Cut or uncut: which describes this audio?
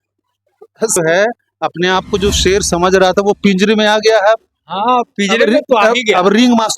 cut